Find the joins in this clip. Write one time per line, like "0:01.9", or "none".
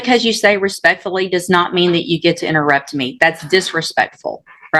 none

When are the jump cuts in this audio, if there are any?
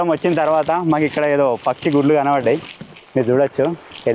none

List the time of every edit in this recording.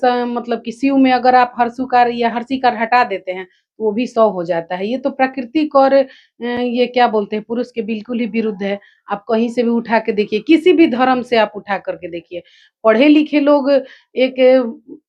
none

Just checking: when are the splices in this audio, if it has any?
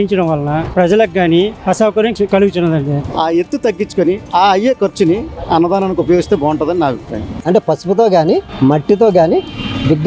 0:02.1
0:03.1
0:07.4

